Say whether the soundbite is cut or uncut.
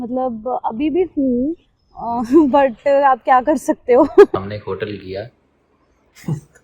cut